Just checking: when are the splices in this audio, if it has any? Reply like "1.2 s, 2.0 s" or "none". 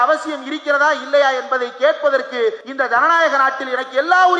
2.7 s